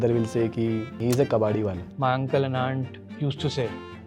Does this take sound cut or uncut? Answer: cut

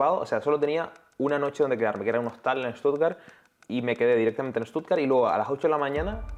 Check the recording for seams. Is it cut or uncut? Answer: uncut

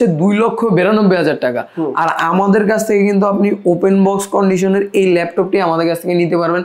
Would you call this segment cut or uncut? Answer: uncut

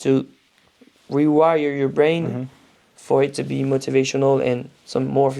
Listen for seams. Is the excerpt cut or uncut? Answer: uncut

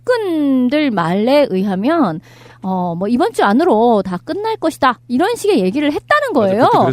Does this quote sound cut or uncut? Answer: cut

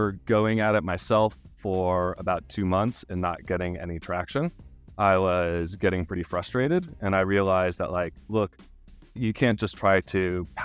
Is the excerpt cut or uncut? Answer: uncut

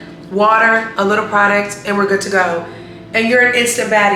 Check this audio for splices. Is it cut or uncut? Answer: uncut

